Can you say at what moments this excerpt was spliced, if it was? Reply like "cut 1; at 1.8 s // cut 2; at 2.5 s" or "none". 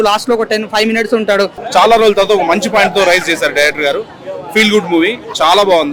cut 1; at 1.6 s

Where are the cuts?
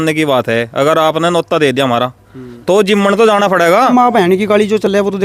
cut 1; at 3.9 s

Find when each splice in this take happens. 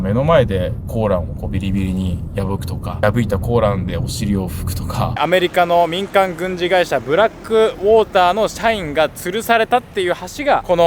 cut 1; at 5.2 s

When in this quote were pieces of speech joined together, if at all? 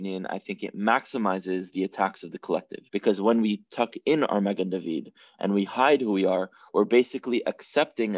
cut 1; at 2.8 s

